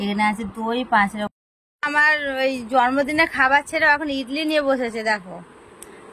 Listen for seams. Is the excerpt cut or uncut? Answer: cut